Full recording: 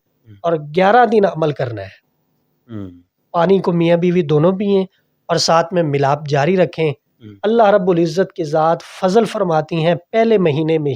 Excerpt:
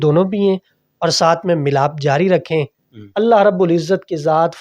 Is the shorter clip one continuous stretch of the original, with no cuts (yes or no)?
yes